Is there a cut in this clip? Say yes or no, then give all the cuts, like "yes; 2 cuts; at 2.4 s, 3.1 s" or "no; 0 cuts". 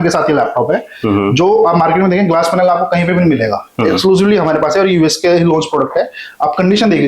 no; 0 cuts